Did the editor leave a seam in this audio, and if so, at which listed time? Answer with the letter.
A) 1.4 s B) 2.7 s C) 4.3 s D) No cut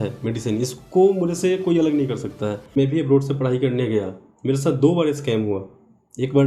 B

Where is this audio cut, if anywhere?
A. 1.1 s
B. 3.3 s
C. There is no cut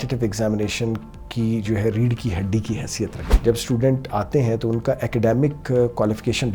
B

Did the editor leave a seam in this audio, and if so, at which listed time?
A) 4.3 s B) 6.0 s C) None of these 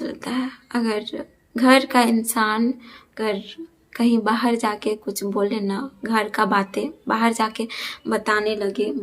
C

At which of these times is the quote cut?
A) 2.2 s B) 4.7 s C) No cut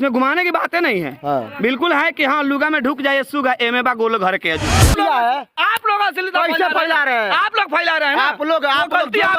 B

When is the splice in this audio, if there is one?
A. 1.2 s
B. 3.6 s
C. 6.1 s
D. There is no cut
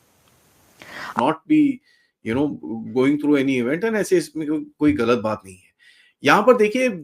A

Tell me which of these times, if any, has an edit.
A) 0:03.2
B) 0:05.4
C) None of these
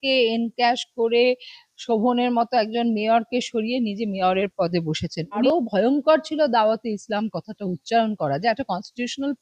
B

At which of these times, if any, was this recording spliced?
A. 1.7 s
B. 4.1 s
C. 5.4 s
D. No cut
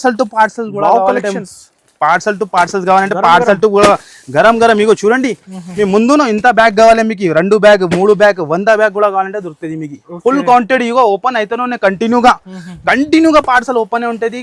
D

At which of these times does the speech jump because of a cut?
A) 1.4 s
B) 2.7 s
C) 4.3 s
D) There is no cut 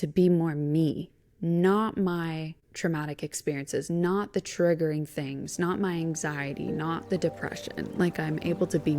D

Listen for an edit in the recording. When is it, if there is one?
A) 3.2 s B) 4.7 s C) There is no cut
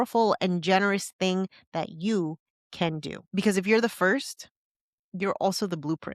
A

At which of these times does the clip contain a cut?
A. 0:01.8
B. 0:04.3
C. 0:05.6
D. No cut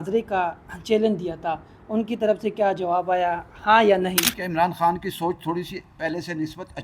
B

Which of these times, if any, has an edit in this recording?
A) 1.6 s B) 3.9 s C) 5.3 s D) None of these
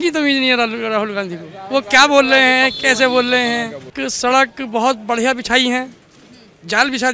B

